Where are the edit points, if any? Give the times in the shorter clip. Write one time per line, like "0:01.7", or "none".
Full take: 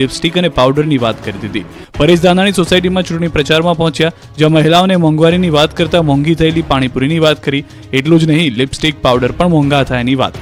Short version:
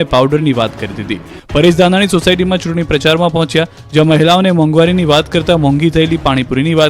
none